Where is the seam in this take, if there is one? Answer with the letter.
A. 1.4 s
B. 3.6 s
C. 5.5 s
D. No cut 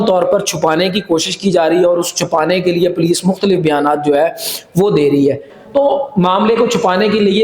C